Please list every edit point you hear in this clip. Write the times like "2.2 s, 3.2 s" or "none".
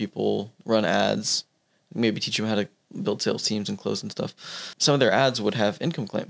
4.7 s

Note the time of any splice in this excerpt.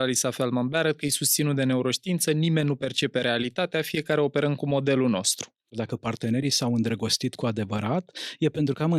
5.8 s

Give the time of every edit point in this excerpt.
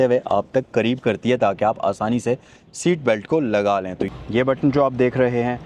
4.0 s

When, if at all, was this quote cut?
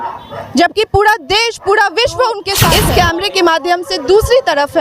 2.8 s

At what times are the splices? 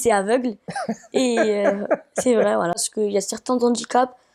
2.9 s

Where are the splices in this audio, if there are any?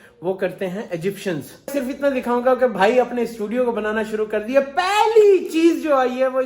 1.7 s

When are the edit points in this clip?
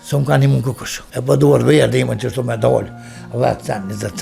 0.9 s

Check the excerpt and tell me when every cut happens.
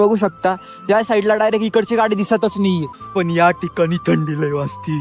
3.0 s

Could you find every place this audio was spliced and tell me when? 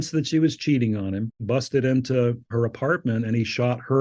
1.4 s

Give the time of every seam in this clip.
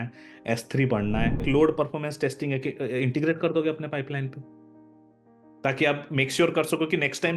1.4 s

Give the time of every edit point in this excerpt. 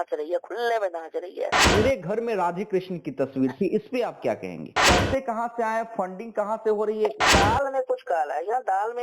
1.6 s, 4.8 s, 7.2 s

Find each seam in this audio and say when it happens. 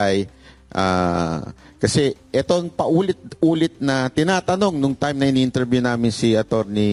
none

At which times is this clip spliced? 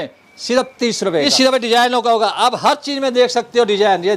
1.2 s

